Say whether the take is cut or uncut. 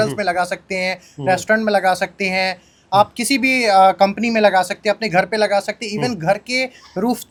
uncut